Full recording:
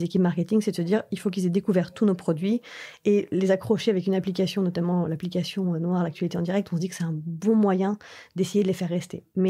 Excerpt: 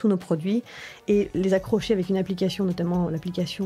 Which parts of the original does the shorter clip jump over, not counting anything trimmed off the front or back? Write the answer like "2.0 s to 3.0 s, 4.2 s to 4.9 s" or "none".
none